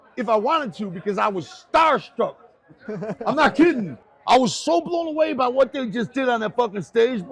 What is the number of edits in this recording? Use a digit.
0